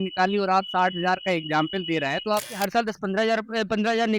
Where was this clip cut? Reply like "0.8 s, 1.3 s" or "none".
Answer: 2.5 s